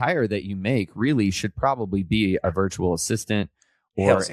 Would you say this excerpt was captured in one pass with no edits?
yes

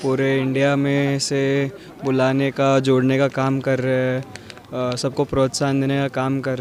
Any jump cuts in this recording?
no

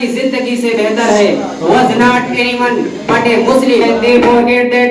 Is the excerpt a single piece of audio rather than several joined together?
no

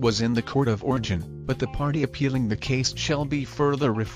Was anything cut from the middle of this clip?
no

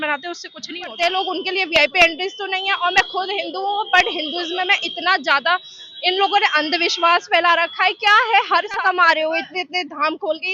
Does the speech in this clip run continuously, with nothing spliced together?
no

